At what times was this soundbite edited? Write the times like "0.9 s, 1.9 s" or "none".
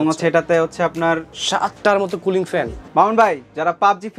1.3 s, 2.8 s